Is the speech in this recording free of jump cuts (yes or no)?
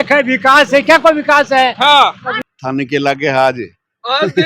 no